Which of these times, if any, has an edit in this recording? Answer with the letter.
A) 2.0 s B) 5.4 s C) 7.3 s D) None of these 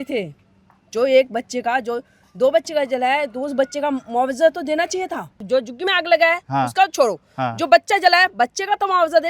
B